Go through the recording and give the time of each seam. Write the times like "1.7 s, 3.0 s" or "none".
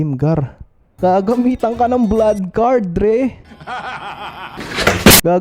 1.0 s